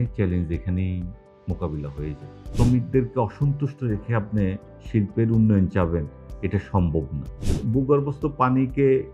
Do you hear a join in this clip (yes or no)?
yes